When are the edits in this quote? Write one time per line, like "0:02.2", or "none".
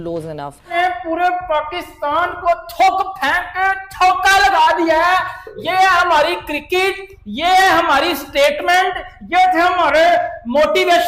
0:00.9